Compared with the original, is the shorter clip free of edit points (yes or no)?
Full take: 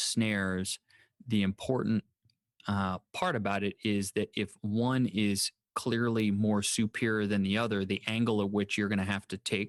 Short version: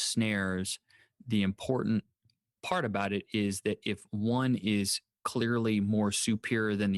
no